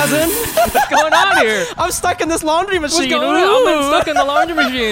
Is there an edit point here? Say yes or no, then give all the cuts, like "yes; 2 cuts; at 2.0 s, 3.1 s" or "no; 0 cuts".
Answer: no; 0 cuts